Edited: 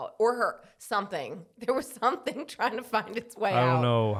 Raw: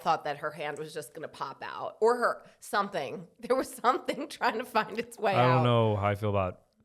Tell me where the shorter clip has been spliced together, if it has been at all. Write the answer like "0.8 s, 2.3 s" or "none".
none